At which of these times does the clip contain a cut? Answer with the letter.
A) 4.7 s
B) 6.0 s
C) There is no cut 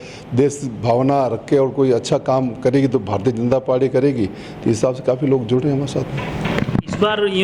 C